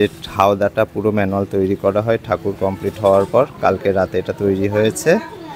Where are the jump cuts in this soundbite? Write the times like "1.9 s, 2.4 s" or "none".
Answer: none